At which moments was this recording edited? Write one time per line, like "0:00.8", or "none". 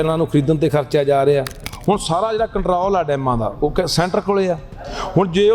0:01.7